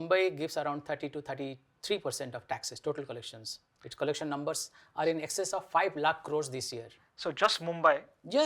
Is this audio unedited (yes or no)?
yes